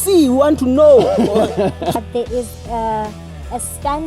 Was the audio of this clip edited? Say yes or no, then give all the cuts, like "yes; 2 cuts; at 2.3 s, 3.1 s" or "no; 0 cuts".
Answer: yes; 1 cut; at 1.9 s